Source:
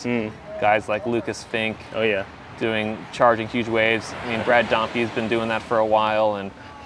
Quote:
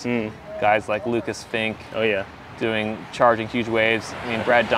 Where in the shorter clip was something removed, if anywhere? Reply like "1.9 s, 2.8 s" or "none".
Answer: none